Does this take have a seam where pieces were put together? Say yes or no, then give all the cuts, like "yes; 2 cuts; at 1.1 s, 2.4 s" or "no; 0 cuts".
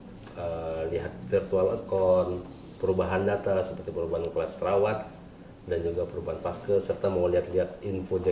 no; 0 cuts